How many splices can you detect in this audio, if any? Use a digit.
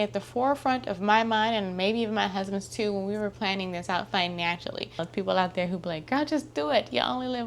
1